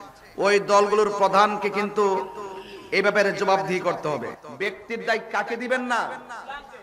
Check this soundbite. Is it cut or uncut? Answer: cut